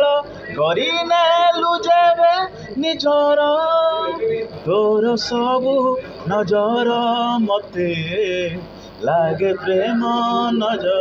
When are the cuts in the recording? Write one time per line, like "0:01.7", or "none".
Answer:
none

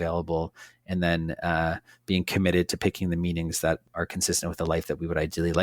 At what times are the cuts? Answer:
0:03.8

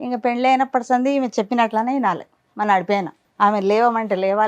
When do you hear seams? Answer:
0:03.2

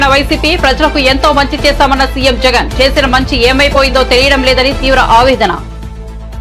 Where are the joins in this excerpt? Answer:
none

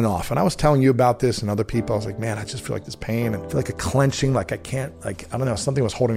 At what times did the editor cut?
0:03.4

